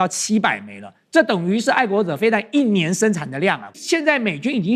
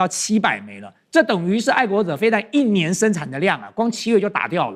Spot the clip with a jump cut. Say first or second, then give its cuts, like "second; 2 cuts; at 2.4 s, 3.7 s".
first; 1 cut; at 3.7 s